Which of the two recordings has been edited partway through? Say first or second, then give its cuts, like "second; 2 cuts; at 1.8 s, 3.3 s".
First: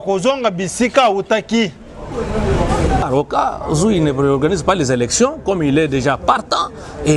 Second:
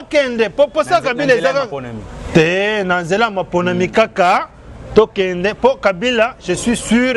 first; 1 cut; at 3.0 s